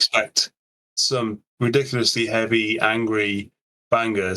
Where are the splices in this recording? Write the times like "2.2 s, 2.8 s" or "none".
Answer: 1.5 s